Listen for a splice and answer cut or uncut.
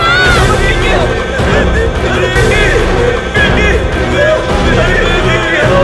cut